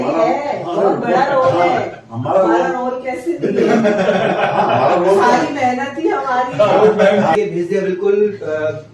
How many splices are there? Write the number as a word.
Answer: one